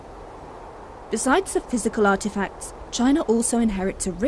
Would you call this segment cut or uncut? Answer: uncut